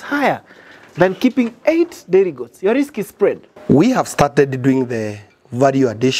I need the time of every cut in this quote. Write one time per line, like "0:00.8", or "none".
0:03.5